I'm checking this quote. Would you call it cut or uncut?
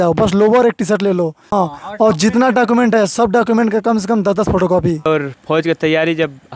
cut